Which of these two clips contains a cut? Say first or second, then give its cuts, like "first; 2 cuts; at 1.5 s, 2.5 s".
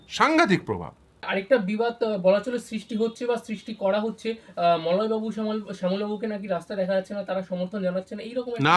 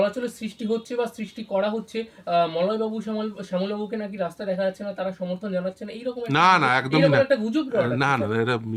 first; 1 cut; at 1.3 s